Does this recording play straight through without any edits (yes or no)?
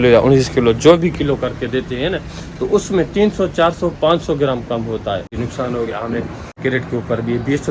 no